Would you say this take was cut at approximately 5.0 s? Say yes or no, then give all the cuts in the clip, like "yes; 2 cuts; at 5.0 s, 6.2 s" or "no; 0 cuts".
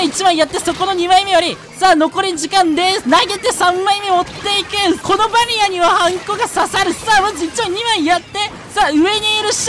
yes; 1 cut; at 5.0 s